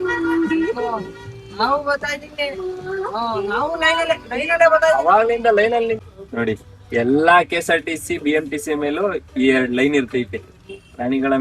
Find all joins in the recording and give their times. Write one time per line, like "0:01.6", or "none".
0:06.0